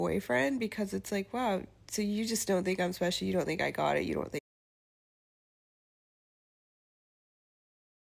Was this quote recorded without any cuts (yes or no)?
yes